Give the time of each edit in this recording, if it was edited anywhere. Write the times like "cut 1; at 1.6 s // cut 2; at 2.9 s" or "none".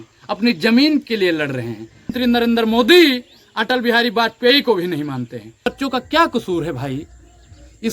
cut 1; at 2.1 s // cut 2; at 5.7 s